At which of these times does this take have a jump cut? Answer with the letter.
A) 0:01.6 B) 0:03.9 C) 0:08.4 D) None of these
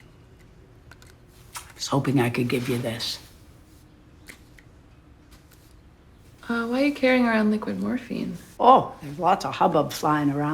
C